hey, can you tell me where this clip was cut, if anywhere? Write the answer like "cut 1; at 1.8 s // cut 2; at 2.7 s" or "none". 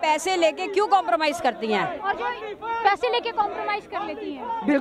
none